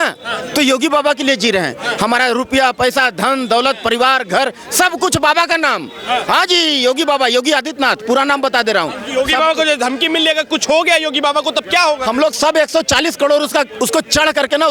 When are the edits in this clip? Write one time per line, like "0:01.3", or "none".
none

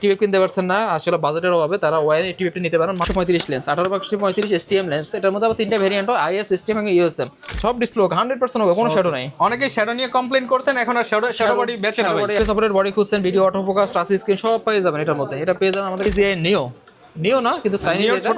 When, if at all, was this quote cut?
0:03.1
0:07.5
0:12.4
0:16.1

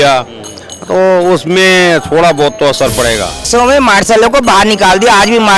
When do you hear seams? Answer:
0:03.5

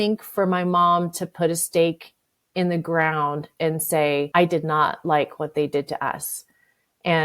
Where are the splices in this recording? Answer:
0:04.3

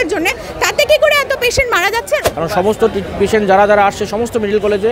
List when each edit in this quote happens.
0:02.3

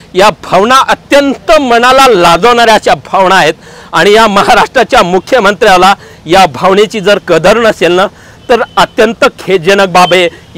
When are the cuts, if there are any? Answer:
none

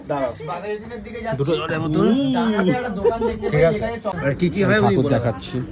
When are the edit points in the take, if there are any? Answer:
0:04.1

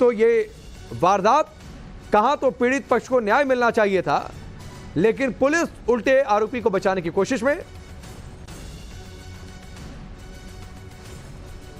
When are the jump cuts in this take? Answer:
0:07.9

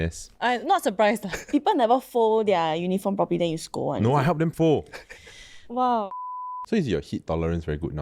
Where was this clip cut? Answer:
0:01.5
0:06.1

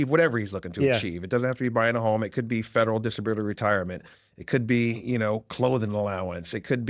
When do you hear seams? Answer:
none

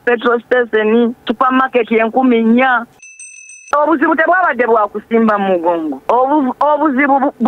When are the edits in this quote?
0:01.2
0:03.5
0:05.9

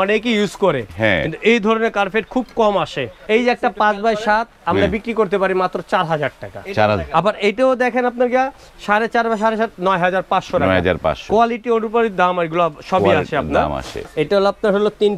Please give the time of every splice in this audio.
0:03.2
0:14.0

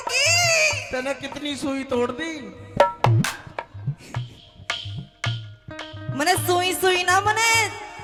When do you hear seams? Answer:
none

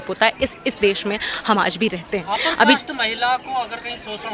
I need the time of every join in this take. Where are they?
none

